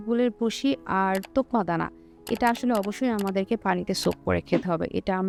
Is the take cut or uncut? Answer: uncut